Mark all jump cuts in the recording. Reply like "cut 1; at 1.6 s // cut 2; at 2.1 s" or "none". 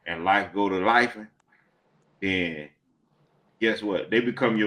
none